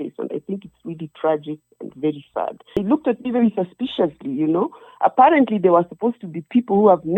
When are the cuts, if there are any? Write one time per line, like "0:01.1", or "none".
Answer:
0:02.8